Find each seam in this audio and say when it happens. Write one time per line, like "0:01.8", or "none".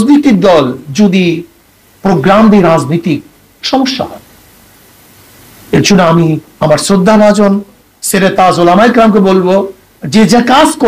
none